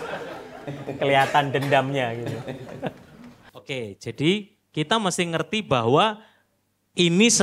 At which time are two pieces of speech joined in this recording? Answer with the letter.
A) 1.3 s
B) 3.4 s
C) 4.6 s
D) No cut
B